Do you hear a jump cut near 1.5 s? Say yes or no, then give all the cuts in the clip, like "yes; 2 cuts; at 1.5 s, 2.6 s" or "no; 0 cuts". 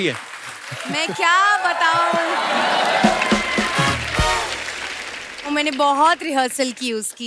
no; 0 cuts